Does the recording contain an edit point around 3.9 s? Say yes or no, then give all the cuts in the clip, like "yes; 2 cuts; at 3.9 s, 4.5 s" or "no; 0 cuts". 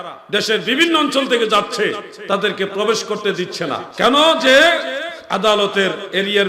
yes; 1 cut; at 3.9 s